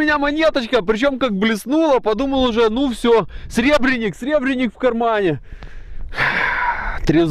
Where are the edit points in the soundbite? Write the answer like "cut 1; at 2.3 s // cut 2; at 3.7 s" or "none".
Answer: none